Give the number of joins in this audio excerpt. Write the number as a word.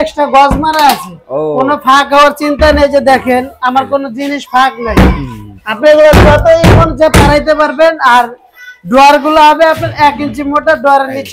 zero